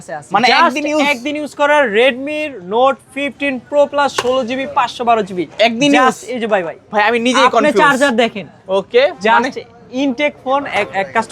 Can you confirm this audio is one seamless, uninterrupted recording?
yes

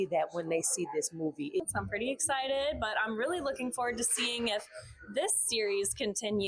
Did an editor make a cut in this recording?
yes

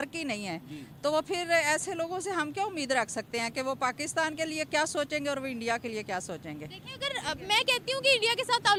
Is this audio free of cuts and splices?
yes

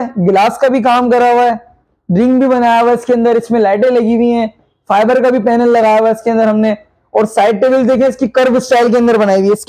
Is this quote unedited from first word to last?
yes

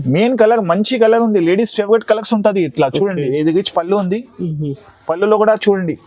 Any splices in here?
no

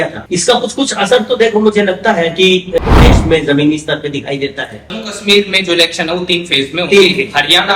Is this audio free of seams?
no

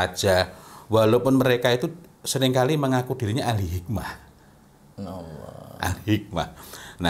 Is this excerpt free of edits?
yes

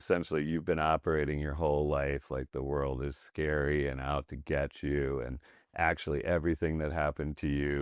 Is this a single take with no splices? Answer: yes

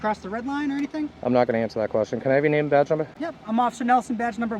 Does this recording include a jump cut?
no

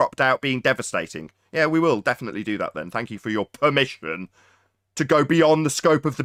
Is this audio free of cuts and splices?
yes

